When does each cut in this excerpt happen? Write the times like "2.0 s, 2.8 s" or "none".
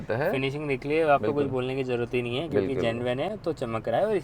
none